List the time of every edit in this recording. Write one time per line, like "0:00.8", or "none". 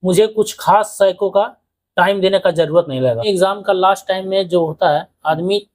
0:03.2